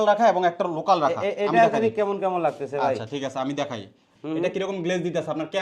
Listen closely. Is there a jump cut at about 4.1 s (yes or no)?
yes